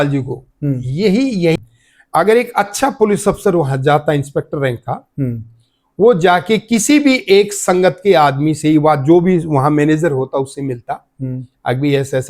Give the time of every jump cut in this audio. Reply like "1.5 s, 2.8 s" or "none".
1.6 s